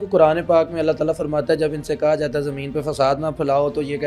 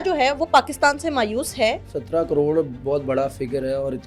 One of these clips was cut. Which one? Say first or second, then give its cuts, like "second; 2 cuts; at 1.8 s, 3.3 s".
second; 1 cut; at 2.0 s